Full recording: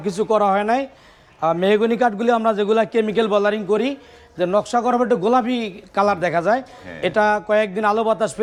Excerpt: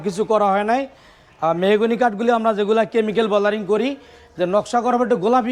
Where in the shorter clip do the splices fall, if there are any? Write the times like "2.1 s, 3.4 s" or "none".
none